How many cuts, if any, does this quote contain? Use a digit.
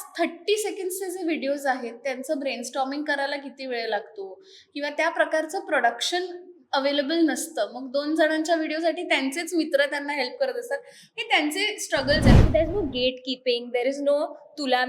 1